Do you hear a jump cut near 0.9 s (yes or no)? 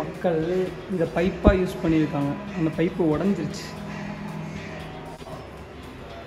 no